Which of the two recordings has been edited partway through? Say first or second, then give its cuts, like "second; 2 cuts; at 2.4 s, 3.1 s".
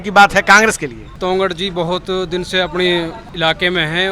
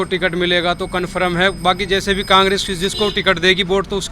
first; 2 cuts; at 1.1 s, 3.2 s